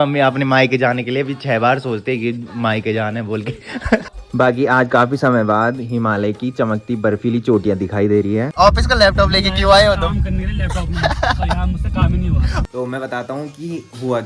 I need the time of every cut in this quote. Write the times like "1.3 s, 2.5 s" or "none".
4.1 s, 8.5 s, 12.7 s